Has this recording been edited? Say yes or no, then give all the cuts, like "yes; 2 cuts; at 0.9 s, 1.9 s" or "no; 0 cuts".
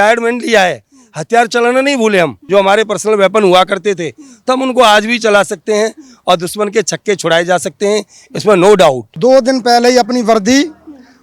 yes; 2 cuts; at 2.4 s, 9.1 s